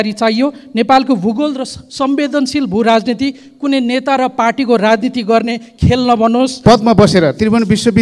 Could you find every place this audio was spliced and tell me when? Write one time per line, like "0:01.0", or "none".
0:06.5

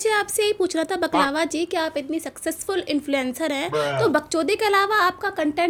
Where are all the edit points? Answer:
none

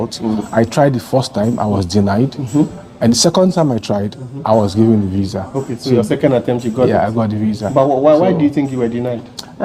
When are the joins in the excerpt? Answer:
none

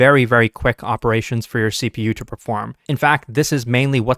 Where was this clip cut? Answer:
none

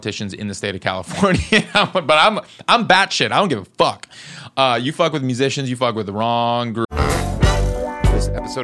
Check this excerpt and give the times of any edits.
0:06.9

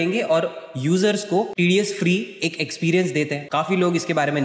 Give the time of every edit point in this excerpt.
0:01.5
0:03.4

